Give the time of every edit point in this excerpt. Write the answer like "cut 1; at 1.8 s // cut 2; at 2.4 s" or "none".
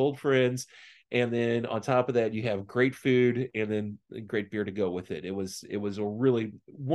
none